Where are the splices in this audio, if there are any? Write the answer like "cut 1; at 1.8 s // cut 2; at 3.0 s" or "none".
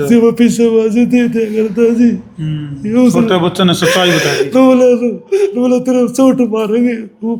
none